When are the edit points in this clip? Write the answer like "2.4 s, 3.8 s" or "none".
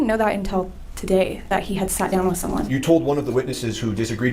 2.7 s